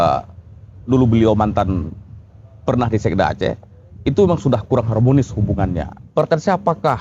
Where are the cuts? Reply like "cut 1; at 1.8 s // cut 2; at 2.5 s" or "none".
cut 1; at 5.9 s